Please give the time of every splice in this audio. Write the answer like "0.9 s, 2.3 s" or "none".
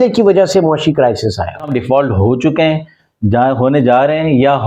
1.7 s